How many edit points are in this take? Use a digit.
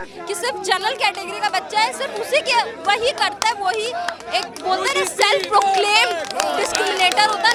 0